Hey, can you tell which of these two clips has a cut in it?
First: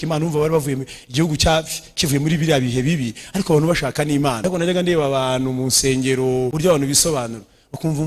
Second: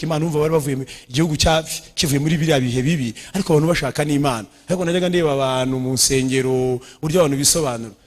first; 2 cuts; at 4.4 s, 6.5 s

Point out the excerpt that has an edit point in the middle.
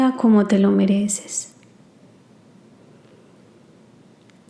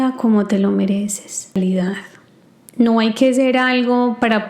second; 1 cut; at 1.6 s

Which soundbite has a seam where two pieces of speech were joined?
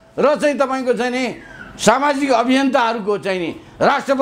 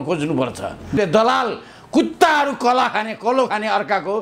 second; 1 cut; at 1.0 s

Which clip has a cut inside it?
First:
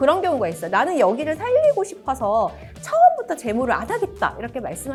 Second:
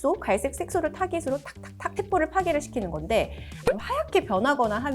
second; 1 cut; at 3.5 s

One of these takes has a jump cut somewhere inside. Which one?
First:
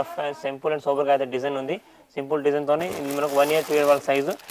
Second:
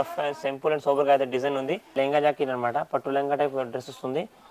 second; 1 cut; at 1.9 s

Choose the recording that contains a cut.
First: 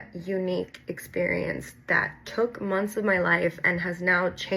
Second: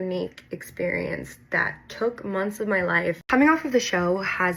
second; 1 cut; at 3.2 s

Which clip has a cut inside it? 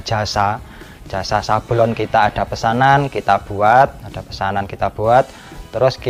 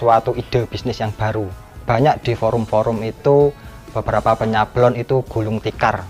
second; 1 cut; at 1.7 s

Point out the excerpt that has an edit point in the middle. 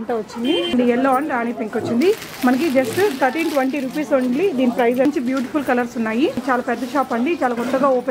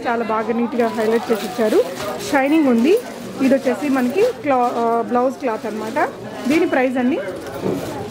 first; 3 cuts; at 0.7 s, 5.1 s, 6.4 s

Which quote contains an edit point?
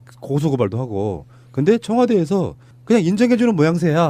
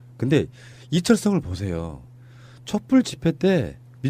second; 1 cut; at 1.0 s

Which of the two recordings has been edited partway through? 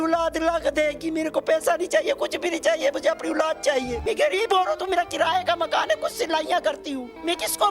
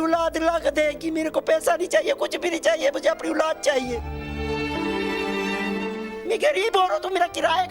first; 1 cut; at 4.0 s

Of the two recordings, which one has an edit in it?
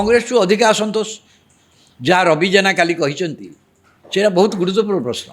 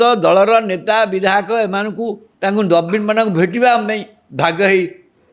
second; 1 cut; at 2.2 s

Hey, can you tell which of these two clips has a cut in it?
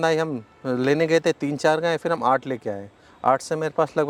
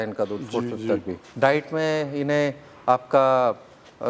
second; 1 cut; at 1.2 s

